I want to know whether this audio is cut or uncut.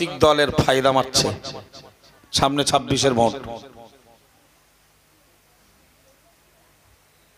uncut